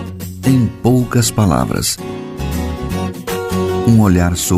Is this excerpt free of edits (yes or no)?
yes